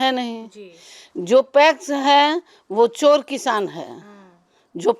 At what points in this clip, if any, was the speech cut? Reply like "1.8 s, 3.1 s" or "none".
none

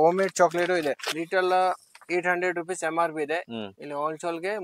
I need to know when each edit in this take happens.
1.2 s

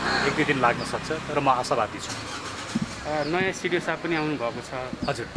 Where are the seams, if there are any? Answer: none

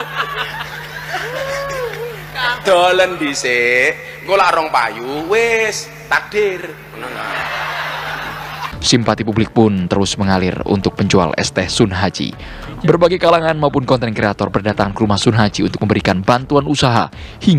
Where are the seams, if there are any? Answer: none

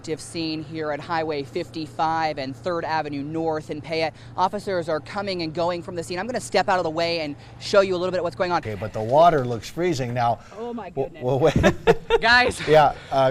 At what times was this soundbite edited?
8.7 s

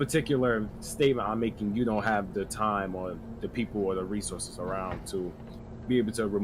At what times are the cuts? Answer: none

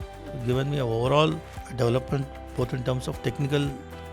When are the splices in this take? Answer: 1.6 s

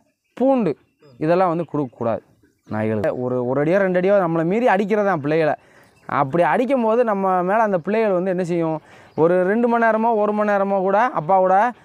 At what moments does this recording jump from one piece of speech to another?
3.0 s

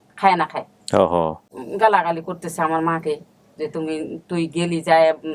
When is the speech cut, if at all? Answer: 1.4 s

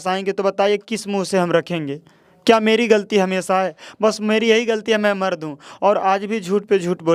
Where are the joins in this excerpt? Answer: none

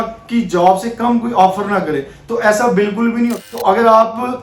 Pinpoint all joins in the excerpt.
3.4 s

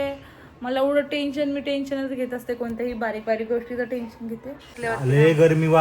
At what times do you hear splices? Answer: 4.7 s

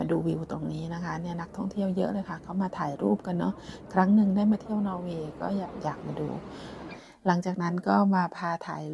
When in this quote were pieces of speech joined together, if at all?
6.9 s

